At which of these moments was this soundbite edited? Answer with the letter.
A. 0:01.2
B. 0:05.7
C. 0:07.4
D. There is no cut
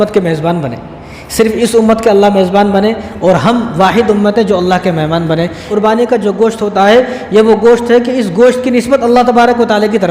B